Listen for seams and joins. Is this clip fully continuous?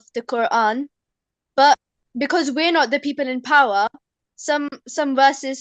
yes; 0 cuts

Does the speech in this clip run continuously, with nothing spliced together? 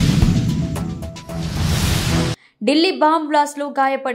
yes; 0 cuts

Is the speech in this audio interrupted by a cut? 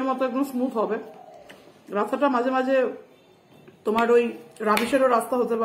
no; 0 cuts

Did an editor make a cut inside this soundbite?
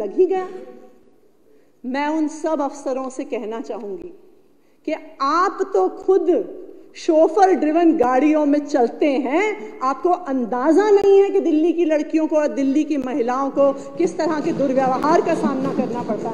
no; 0 cuts

